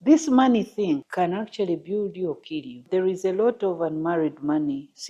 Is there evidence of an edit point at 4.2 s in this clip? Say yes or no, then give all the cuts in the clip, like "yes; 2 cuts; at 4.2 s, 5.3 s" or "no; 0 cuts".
no; 2 cuts; at 1.1 s, 2.9 s